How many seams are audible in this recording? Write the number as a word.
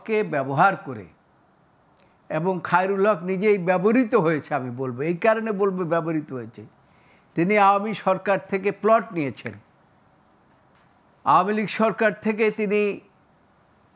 zero